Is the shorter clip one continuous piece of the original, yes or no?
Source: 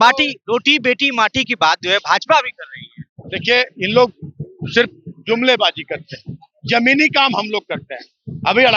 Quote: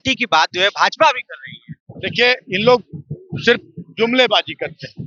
yes